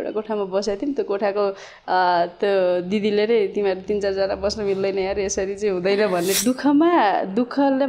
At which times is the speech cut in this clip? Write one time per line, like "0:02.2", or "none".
0:06.4